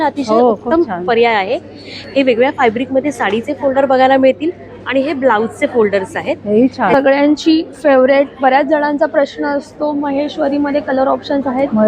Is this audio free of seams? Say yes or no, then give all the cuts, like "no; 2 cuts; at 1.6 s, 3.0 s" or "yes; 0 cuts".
no; 1 cut; at 6.9 s